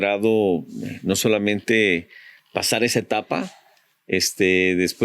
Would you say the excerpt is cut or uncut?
uncut